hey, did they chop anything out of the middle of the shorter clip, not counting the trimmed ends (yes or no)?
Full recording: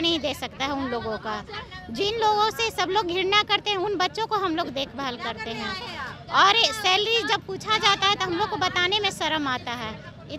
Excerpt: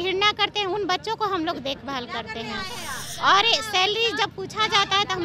no